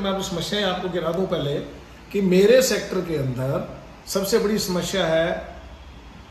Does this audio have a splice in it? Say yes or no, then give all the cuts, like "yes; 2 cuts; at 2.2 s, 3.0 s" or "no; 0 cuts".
no; 0 cuts